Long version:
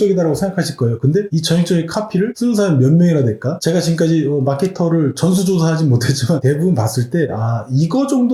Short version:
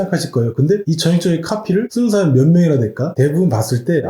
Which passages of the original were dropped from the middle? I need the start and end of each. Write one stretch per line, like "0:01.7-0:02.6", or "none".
0:03.6-0:06.4